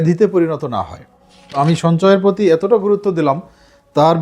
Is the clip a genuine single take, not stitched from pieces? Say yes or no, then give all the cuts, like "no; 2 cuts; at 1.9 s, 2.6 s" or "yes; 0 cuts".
no; 1 cut; at 1.5 s